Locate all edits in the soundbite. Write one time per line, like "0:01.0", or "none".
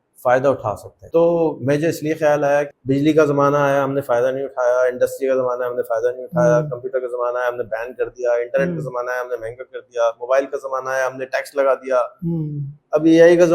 0:00.9
0:02.7